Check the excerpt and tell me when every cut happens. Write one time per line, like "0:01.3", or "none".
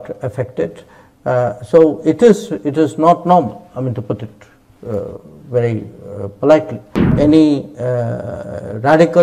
0:07.1